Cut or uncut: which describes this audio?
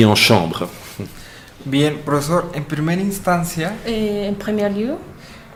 uncut